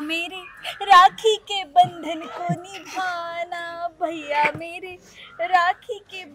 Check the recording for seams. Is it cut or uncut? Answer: uncut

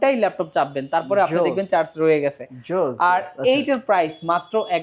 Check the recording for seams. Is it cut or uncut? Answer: uncut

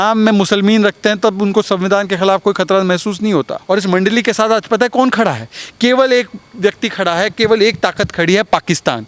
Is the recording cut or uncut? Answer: cut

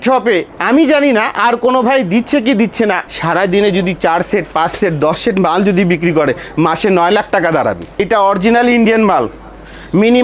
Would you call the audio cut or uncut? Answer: cut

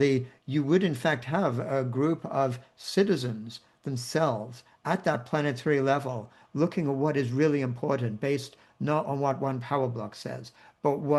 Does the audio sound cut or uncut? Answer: uncut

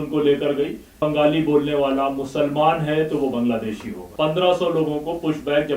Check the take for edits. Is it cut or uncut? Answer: cut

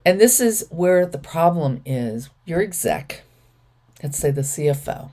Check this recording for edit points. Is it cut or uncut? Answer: cut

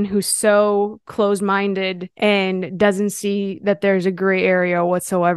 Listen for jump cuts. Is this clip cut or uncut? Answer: cut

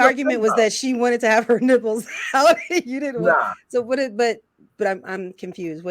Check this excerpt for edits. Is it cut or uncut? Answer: cut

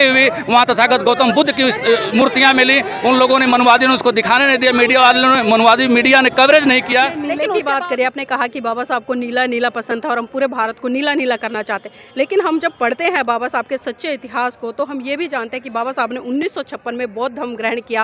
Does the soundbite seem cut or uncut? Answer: cut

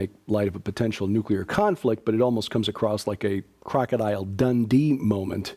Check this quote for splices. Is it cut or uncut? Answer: cut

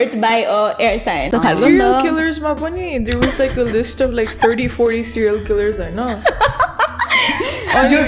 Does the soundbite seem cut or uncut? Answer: cut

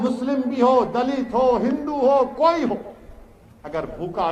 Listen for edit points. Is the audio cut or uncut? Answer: uncut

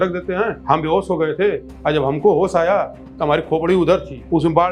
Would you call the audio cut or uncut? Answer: uncut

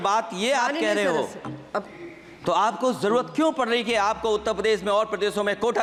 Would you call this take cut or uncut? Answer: uncut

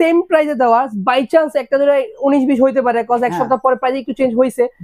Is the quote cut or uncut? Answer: uncut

